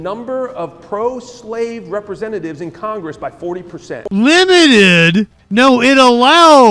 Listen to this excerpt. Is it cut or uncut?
cut